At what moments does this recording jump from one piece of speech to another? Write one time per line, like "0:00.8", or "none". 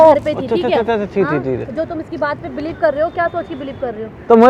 none